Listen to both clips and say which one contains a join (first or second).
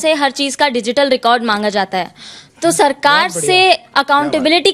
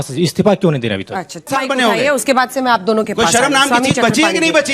second